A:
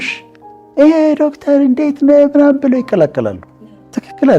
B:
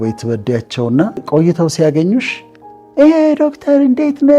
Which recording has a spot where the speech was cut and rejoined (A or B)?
B